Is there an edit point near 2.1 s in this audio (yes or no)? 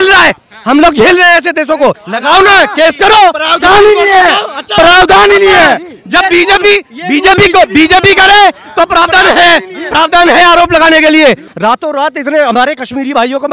yes